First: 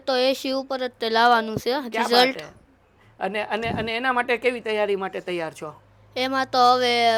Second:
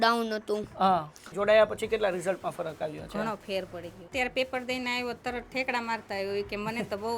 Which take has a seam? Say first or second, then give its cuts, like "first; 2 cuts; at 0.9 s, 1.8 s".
second; 2 cuts; at 1.3 s, 4.1 s